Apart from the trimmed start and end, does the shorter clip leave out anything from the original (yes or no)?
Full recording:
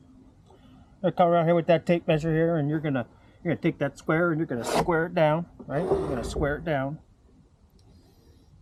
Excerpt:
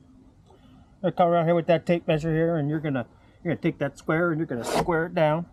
no